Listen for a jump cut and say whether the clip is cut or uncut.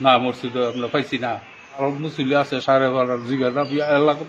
cut